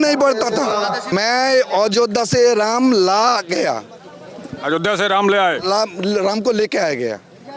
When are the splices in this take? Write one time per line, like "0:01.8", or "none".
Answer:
0:01.1

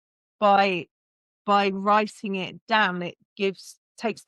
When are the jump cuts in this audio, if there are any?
none

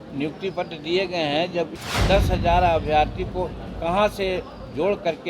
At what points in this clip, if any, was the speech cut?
0:01.8

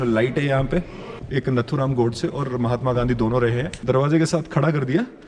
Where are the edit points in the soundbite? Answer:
0:01.0
0:03.7

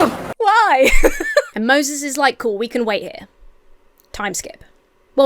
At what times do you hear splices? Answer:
0:01.5

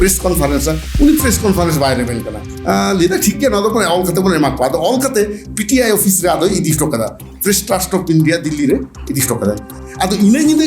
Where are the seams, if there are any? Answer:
0:09.7

